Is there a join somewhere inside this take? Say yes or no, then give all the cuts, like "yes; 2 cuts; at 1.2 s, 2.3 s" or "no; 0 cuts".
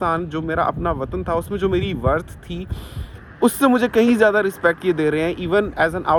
no; 0 cuts